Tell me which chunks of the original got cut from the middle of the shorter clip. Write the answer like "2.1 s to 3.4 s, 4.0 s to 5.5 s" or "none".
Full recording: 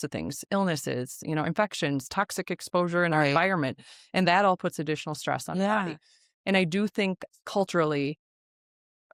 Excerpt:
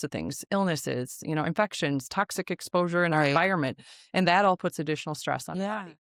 none